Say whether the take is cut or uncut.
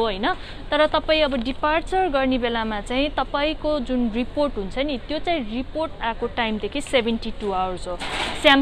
uncut